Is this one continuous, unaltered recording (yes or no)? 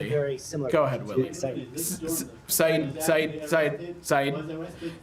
no